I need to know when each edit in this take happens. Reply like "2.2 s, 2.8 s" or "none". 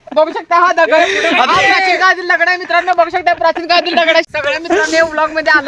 4.3 s